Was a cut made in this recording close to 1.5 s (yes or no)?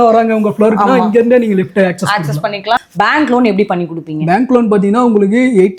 no